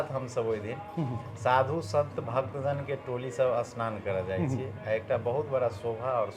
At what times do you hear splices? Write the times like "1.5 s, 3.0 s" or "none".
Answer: none